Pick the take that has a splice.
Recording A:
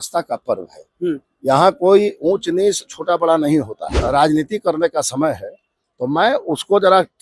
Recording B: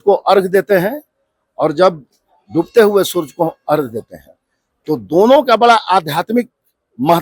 A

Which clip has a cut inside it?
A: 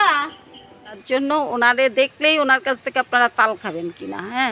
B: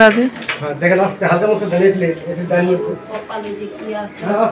A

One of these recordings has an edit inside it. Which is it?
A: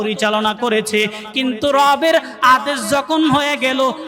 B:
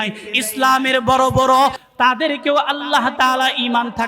B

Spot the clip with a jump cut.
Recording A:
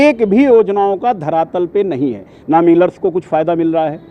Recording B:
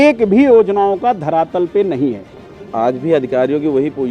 B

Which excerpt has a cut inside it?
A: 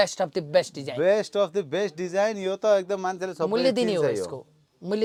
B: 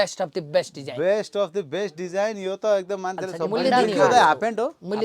B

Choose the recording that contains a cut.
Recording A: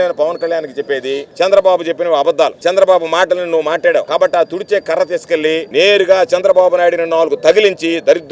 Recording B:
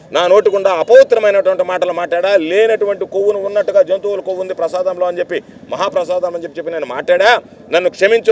A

